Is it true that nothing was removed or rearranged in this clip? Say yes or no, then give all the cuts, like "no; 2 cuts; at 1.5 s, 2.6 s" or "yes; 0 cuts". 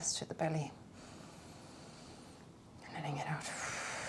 yes; 0 cuts